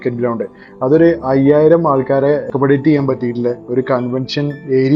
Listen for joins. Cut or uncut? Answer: uncut